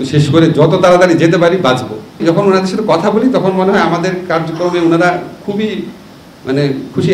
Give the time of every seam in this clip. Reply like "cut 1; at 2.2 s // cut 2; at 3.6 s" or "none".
cut 1; at 2.2 s